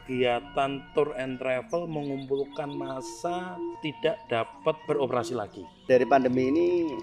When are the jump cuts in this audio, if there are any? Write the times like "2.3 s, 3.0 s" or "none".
3.8 s, 4.8 s, 5.9 s